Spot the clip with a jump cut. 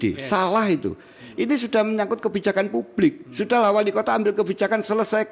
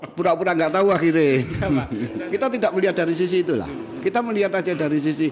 second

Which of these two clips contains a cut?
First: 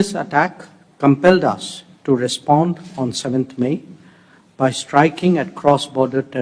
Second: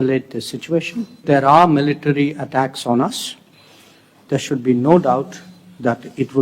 second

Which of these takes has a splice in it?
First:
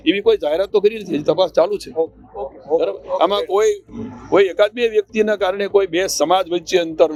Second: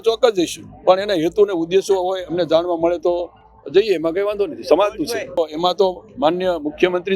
second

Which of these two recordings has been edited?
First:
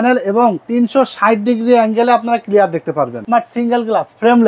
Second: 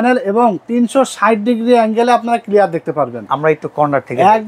first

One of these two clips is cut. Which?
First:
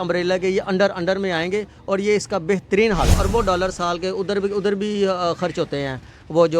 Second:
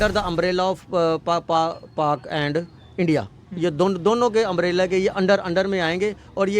first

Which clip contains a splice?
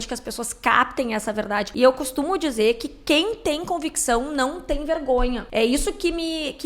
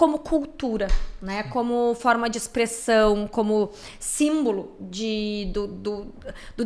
first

